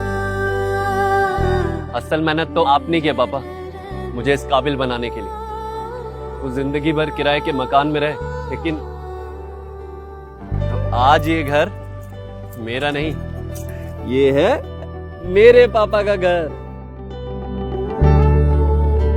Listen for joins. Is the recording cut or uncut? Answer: cut